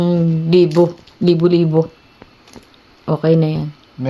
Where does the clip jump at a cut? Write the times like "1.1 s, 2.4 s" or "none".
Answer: none